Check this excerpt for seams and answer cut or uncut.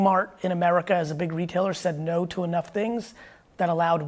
uncut